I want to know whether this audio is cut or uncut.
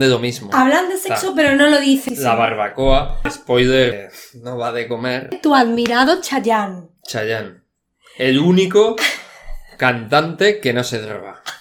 cut